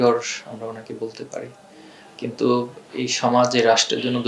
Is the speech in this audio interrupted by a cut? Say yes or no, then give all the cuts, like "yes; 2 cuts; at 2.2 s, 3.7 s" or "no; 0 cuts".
no; 0 cuts